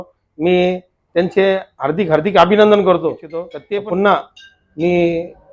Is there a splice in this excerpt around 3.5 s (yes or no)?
yes